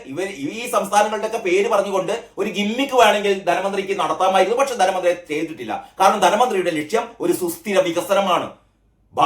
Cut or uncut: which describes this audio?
uncut